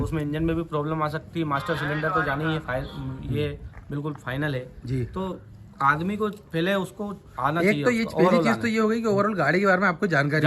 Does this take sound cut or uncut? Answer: uncut